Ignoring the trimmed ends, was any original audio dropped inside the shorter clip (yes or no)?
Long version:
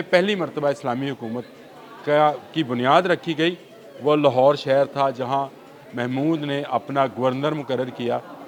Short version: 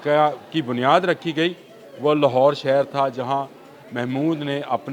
no